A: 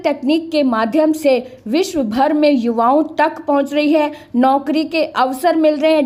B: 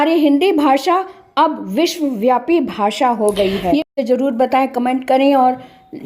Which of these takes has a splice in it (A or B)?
B